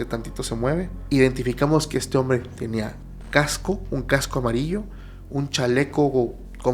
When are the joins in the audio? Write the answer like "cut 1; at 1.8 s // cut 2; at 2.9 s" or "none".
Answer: cut 1; at 1.0 s